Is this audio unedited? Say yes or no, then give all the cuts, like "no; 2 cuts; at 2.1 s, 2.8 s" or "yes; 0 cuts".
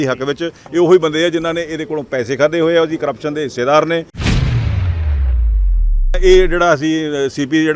no; 2 cuts; at 4.1 s, 6.2 s